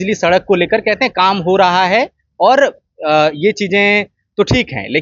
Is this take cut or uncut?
uncut